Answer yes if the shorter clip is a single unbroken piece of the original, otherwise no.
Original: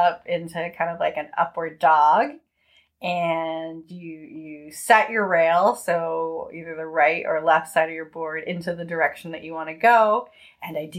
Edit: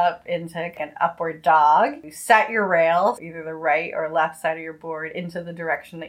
no